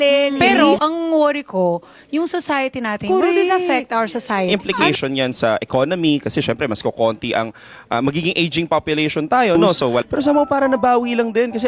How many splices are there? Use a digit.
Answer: 3